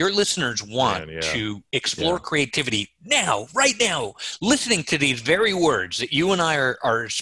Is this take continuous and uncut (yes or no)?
yes